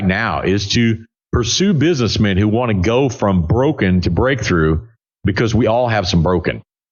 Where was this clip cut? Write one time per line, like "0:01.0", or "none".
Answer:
none